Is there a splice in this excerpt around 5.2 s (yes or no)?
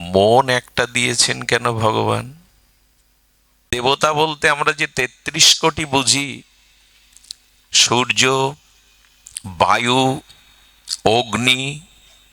no